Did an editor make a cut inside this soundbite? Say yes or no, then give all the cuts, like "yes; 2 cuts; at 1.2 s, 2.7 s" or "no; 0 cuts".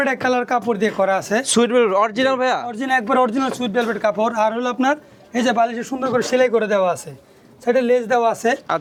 no; 0 cuts